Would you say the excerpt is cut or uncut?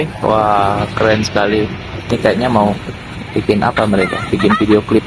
uncut